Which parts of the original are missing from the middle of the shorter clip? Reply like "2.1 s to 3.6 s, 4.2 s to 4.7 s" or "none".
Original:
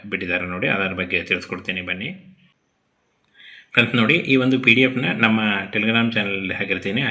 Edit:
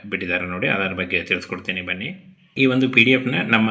2.5 s to 4.2 s